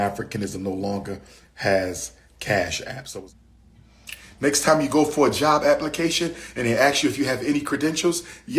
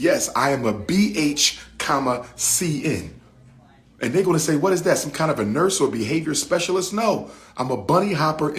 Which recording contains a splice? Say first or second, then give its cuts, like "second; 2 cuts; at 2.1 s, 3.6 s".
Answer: first; 1 cut; at 2.9 s